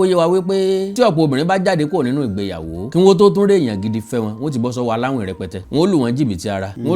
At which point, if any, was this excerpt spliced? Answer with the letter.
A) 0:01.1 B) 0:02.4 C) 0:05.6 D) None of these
C